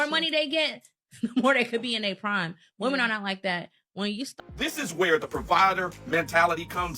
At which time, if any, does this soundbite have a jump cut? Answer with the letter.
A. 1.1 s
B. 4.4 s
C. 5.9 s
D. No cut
B